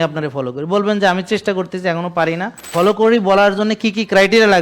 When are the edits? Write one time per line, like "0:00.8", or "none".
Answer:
0:02.6